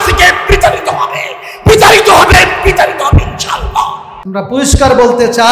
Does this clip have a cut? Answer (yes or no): yes